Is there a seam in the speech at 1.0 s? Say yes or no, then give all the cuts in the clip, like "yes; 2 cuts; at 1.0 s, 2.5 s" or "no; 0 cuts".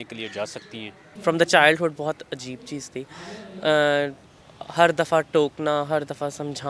yes; 1 cut; at 1.0 s